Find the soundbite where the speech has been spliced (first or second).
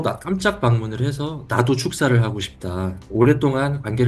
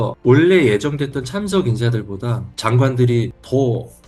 first